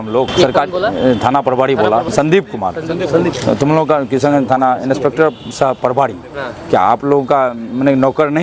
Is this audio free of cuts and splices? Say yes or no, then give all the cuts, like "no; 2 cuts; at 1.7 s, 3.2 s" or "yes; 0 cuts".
yes; 0 cuts